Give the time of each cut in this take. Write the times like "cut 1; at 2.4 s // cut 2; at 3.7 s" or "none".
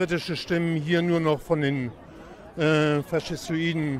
none